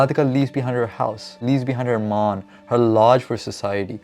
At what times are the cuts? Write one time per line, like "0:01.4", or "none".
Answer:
0:01.4